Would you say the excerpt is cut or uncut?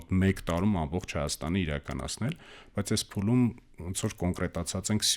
uncut